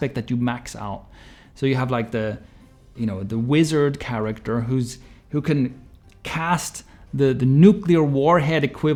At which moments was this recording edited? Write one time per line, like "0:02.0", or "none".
none